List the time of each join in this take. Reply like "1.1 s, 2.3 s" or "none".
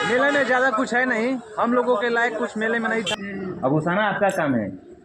3.2 s